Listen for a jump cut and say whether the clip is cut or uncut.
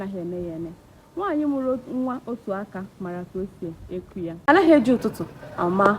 cut